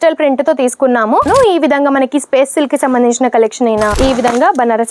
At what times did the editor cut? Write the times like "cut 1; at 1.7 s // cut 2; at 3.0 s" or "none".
cut 1; at 1.3 s // cut 2; at 4.0 s